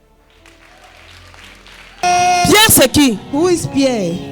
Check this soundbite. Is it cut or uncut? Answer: cut